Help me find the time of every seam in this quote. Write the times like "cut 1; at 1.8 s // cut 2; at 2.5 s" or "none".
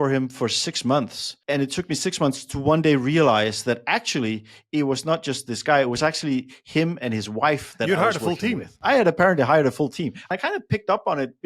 cut 1; at 1.3 s // cut 2; at 8.8 s // cut 3; at 10.2 s